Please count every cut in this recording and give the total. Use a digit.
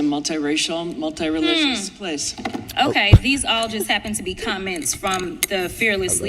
1